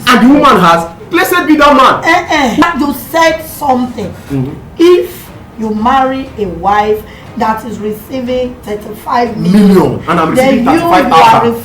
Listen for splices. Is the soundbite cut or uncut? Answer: cut